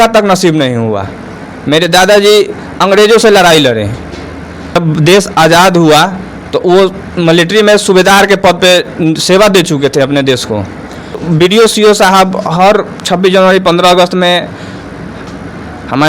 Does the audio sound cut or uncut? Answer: cut